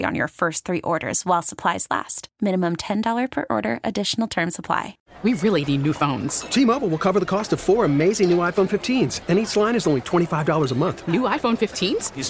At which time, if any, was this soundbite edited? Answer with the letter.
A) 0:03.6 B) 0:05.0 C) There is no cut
B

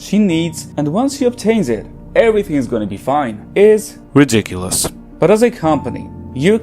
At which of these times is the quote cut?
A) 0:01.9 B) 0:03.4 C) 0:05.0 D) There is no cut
C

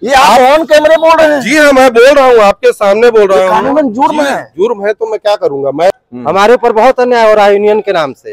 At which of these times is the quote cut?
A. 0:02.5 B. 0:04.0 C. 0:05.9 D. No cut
C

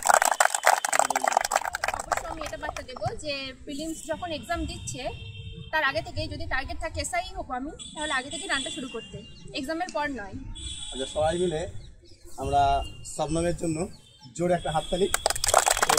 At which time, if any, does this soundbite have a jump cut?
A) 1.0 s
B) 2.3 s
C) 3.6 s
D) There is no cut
B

